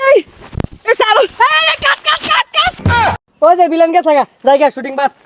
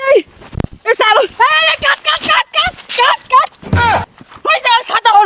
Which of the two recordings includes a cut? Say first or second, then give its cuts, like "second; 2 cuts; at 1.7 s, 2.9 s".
first; 1 cut; at 3.0 s